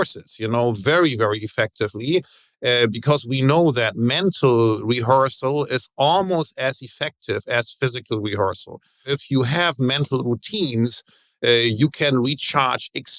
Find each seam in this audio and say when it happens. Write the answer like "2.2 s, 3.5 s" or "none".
9.1 s